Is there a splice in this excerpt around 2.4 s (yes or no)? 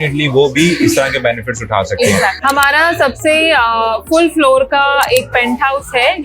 yes